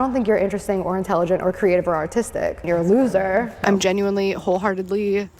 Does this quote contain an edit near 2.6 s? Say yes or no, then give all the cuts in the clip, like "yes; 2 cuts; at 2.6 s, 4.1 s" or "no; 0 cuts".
yes; 2 cuts; at 2.6 s, 3.6 s